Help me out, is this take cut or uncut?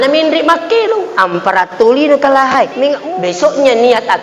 cut